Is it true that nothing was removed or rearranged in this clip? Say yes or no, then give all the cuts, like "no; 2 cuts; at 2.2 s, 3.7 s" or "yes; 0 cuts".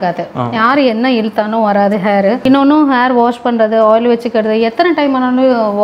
no; 1 cut; at 2.4 s